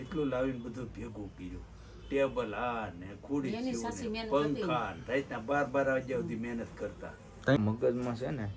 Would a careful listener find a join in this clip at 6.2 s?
no; 1 cut; at 7.6 s

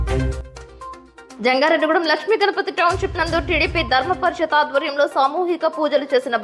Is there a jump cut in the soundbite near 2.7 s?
no; 1 cut; at 1.1 s

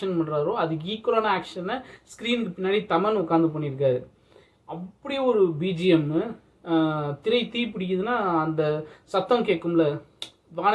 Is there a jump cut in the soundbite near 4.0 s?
no; 0 cuts

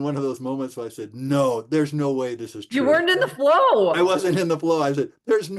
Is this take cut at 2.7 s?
no; 0 cuts

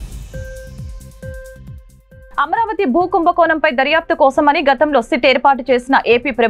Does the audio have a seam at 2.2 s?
yes; 1 cut; at 2.2 s

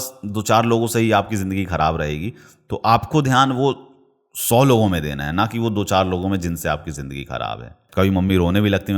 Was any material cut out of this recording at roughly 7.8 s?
yes; 1 cut; at 7.8 s

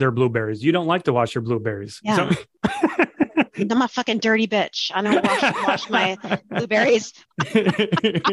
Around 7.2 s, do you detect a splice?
yes; 1 cut; at 7.2 s

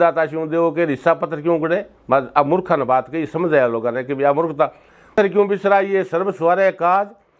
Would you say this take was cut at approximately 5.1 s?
yes; 1 cut; at 5.1 s

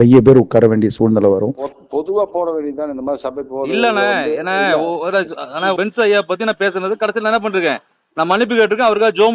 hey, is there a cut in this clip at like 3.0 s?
no; 1 cut; at 1.5 s

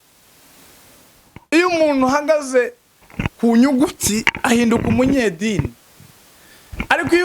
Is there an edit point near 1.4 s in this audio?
yes; 1 cut; at 1.4 s

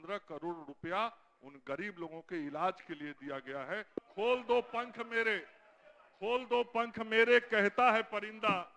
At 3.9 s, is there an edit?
yes; 1 cut; at 3.9 s

